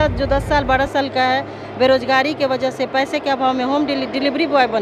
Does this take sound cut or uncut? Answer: uncut